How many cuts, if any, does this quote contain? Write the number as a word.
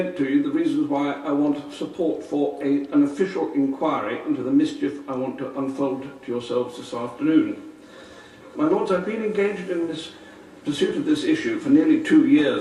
one